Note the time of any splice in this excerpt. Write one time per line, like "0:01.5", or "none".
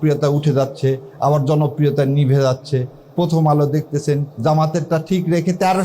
0:04.4